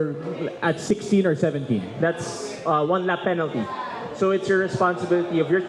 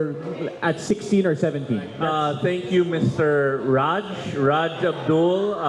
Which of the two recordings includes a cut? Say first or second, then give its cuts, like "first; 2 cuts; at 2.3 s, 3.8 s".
second; 1 cut; at 2.0 s